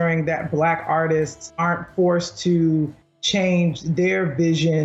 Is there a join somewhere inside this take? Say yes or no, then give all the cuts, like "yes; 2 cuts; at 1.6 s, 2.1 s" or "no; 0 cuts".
yes; 1 cut; at 1.4 s